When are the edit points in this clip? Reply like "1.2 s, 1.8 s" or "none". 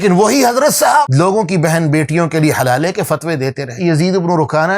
3.7 s